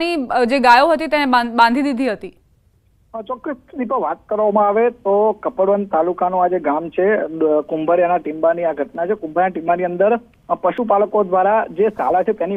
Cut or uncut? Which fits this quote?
uncut